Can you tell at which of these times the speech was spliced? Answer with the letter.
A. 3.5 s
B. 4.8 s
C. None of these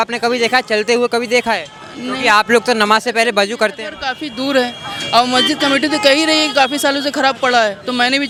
C